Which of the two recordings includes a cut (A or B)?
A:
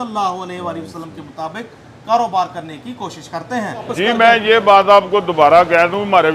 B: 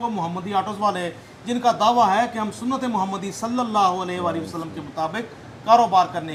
A